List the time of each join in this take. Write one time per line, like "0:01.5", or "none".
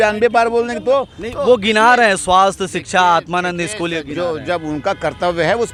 none

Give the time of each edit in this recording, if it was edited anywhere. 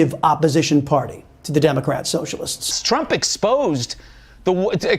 0:02.8

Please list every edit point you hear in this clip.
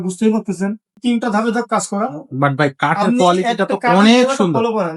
0:00.9

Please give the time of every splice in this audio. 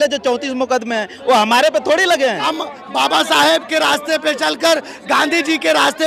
0:02.4

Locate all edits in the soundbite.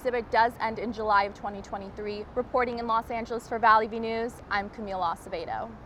none

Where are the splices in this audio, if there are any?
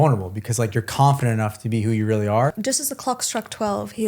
0:02.6

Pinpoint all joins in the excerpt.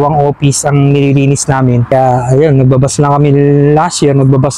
0:01.8

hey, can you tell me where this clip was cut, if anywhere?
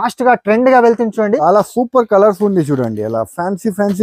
0:01.4

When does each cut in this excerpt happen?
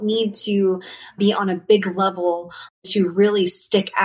0:01.2
0:02.7

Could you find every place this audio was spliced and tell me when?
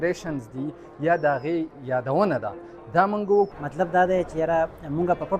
0:03.6

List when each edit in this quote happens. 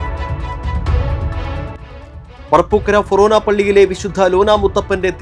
0:01.9

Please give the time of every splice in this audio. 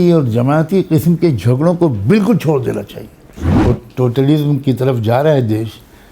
0:03.5

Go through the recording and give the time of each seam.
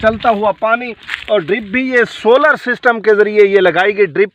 none

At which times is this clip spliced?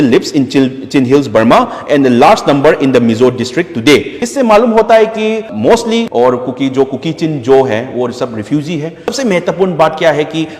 0:09.1

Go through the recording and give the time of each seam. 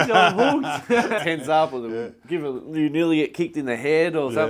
0:01.2

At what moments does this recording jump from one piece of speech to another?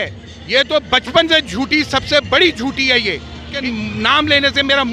0:03.5

